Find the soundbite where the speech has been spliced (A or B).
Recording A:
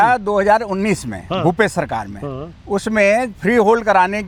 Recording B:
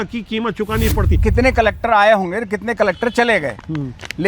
B